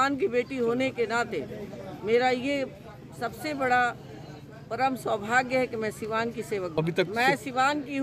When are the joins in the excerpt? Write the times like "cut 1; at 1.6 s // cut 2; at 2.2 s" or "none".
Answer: cut 1; at 6.7 s